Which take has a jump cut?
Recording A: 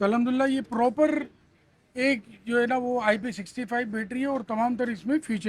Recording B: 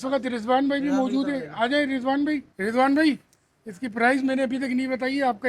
B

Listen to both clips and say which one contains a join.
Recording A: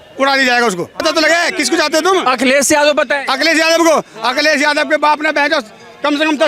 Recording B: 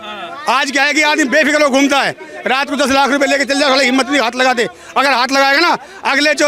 A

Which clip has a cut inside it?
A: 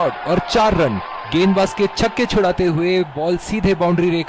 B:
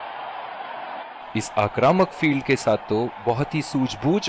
B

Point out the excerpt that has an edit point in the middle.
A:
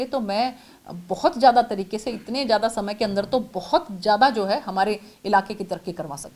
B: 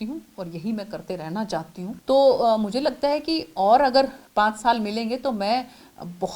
B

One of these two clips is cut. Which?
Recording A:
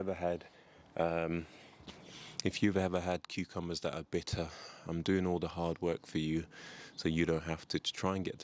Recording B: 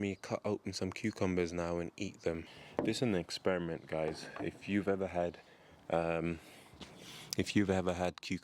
B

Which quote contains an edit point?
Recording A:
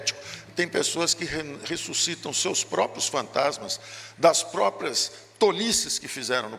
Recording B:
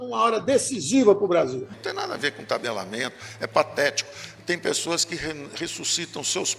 B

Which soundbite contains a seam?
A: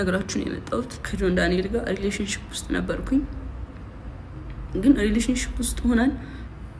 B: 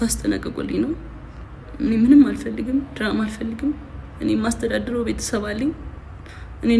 A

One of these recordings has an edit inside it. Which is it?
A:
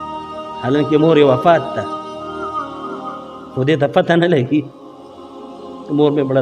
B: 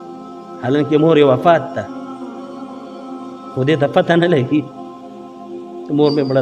B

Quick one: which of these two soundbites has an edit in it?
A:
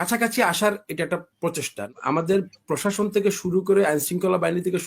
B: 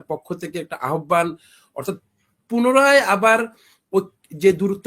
A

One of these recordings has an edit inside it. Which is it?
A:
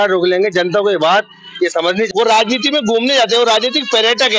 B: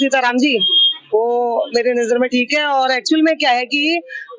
A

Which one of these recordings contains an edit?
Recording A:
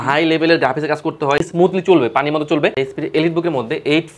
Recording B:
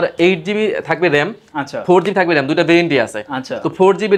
A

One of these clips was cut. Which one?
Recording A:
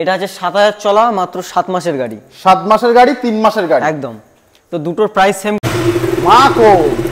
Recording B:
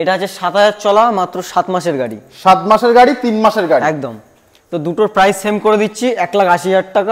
A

